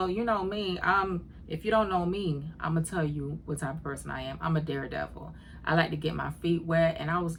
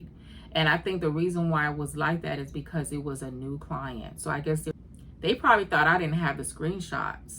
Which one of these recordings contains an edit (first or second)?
second